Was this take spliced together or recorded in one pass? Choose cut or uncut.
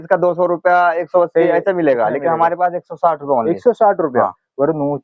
uncut